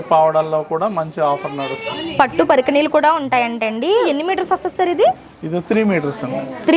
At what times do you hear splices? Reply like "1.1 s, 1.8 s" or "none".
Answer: 1.9 s, 4.0 s